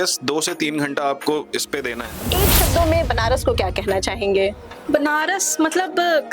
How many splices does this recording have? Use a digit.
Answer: 1